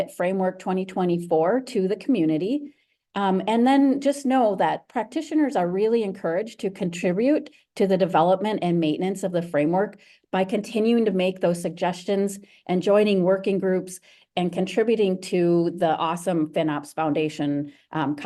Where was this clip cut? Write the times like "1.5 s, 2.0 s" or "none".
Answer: none